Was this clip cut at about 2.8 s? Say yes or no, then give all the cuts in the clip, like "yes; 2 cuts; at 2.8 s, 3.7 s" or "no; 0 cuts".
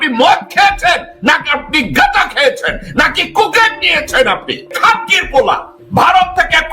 no; 2 cuts; at 4.7 s, 5.7 s